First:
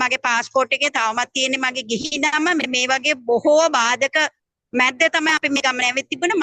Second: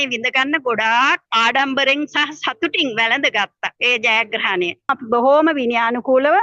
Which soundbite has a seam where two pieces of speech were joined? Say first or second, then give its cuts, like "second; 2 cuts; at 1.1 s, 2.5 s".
second; 3 cuts; at 1.3 s, 3.7 s, 5.0 s